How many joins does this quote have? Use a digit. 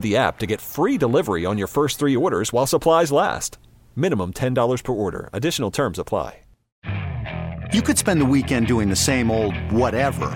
1